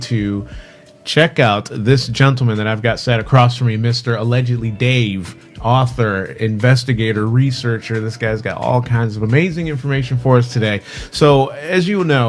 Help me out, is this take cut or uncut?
cut